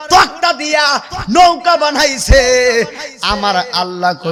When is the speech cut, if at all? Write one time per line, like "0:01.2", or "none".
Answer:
none